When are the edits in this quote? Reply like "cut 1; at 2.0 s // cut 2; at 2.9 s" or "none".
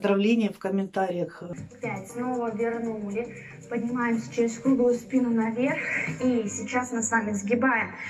cut 1; at 1.4 s